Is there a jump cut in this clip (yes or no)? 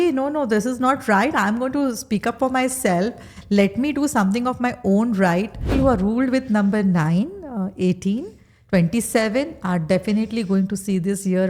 yes